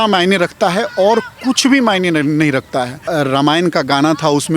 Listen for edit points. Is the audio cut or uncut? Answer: cut